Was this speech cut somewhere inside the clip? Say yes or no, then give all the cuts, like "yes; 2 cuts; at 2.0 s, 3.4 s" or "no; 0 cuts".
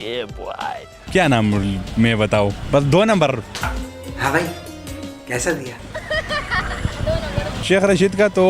yes; 3 cuts; at 1.0 s, 2.6 s, 7.6 s